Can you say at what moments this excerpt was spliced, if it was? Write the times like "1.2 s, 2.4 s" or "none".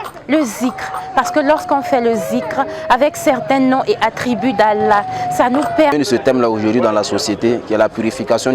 5.9 s